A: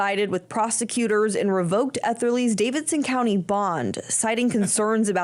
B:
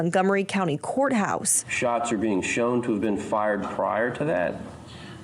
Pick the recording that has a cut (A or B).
B